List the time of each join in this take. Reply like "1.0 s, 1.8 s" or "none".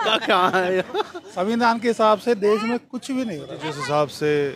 1.2 s, 3.6 s